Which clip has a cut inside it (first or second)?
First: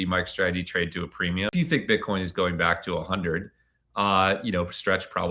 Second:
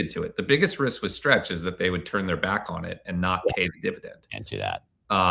first